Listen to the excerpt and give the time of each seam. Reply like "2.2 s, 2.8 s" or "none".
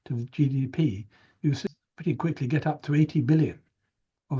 1.9 s